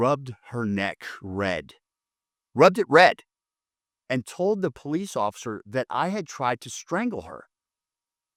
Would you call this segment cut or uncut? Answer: uncut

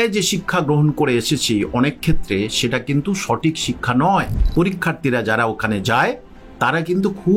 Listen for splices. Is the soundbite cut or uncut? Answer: cut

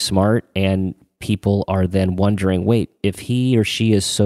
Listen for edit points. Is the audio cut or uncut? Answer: uncut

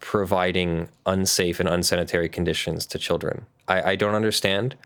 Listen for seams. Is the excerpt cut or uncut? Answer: uncut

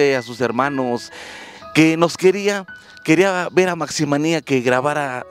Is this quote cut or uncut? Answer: cut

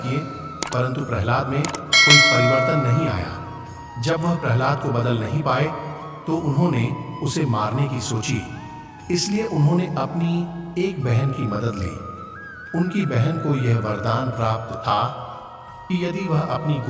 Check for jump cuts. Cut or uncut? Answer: cut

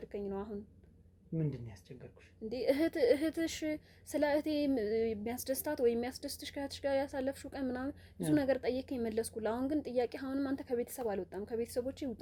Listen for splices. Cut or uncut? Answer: uncut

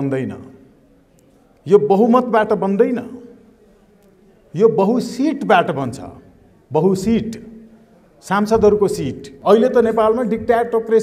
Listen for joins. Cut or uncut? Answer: cut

